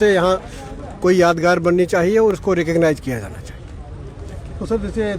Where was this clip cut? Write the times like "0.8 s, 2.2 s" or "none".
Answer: none